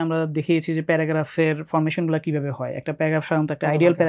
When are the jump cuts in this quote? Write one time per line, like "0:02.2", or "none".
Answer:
none